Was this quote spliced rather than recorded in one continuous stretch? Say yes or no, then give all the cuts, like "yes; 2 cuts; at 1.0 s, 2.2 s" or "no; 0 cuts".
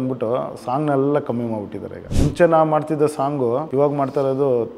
yes; 2 cuts; at 2.1 s, 3.7 s